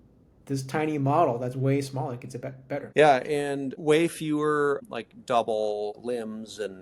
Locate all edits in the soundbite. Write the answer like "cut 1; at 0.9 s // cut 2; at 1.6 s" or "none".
cut 1; at 2.9 s // cut 2; at 3.7 s // cut 3; at 4.8 s // cut 4; at 6.0 s